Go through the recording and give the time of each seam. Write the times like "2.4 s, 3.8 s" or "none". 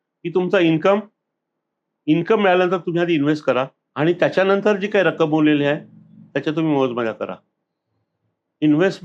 3.8 s